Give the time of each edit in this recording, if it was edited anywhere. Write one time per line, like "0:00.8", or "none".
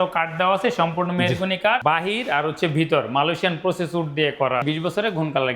0:01.8
0:04.6

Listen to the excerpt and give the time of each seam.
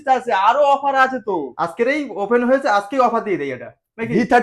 0:01.6

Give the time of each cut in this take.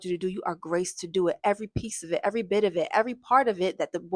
none

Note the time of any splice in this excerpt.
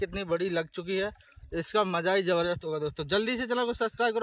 none

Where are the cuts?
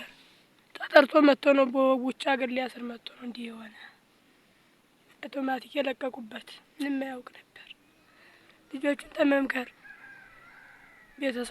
none

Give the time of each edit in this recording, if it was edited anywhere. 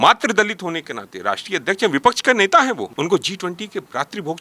0:02.9

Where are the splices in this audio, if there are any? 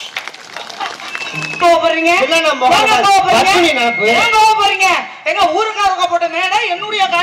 0:01.6

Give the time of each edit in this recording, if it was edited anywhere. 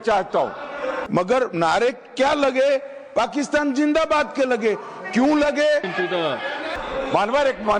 0:01.0
0:06.7

